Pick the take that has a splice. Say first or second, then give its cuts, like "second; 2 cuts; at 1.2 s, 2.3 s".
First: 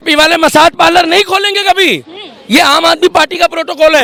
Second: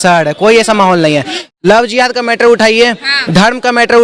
second; 1 cut; at 1.4 s